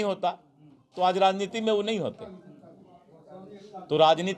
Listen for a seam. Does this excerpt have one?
no; 0 cuts

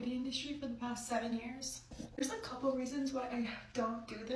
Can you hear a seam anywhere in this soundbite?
no; 0 cuts

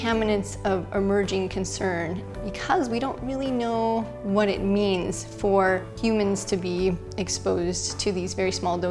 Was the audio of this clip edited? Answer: yes; 2 cuts; at 2.2 s, 5.9 s

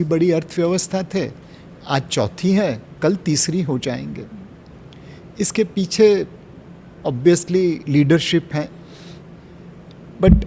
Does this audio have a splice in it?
no; 0 cuts

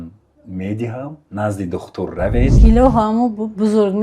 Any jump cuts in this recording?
yes; 1 cut; at 2.6 s

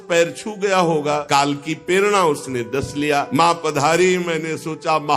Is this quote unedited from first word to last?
no; 2 cuts; at 1.2 s, 3.3 s

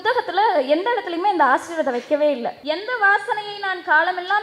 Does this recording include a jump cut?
yes; 1 cut; at 2.5 s

